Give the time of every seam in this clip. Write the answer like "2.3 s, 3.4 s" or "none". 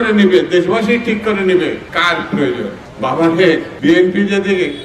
1.9 s, 2.8 s, 3.7 s

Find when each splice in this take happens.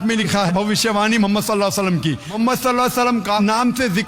2.3 s

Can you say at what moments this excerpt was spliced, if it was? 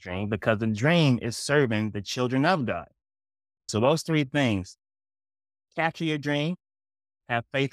3.7 s

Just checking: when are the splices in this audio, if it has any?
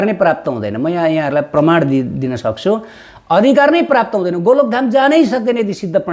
none

